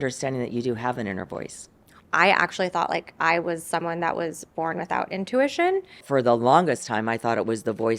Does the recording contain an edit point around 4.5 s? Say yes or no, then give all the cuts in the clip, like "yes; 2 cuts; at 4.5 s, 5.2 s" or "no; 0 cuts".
no; 2 cuts; at 1.9 s, 6.0 s